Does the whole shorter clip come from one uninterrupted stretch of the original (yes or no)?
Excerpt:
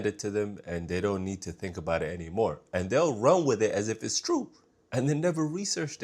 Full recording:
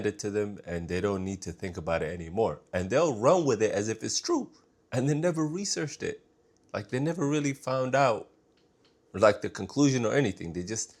yes